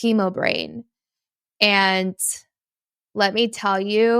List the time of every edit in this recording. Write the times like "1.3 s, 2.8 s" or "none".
none